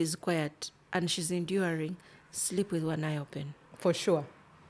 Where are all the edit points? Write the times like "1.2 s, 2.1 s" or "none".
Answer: none